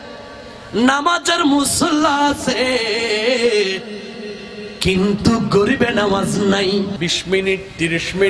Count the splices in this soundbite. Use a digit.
1